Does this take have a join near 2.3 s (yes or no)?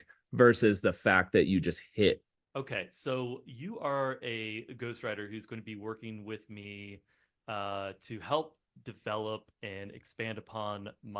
yes